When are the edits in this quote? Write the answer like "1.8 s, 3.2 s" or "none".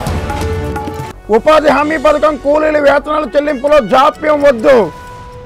1.0 s